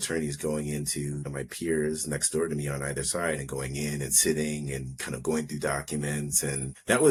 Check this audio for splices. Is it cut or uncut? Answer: uncut